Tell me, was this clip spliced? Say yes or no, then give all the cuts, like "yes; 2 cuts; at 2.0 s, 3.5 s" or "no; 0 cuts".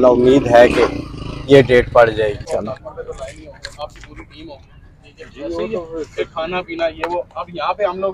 yes; 1 cut; at 2.5 s